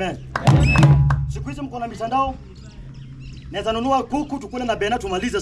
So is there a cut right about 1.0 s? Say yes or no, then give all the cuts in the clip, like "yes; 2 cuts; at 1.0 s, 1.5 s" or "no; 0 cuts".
no; 0 cuts